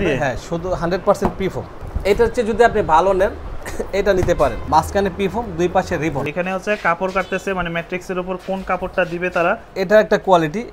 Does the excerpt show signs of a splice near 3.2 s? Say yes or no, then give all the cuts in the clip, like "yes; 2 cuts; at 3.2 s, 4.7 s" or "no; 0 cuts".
no; 4 cuts; at 1.8 s, 4.6 s, 6.3 s, 9.7 s